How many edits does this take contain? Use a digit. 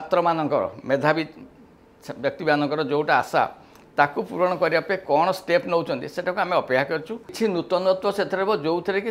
1